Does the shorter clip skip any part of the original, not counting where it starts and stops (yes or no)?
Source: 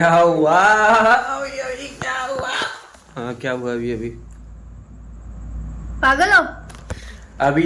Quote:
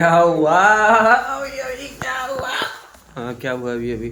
no